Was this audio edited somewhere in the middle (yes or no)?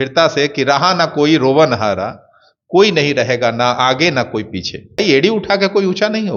yes